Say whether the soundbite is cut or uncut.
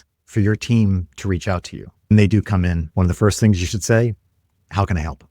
cut